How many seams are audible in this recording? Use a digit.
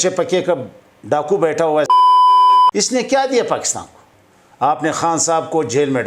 1